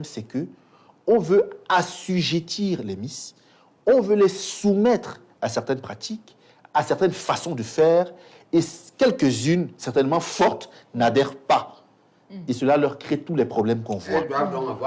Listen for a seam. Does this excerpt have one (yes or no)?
no